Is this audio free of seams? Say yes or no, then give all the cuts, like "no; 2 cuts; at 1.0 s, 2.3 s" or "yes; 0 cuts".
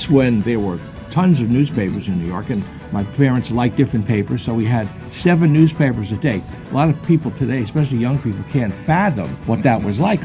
no; 1 cut; at 9.3 s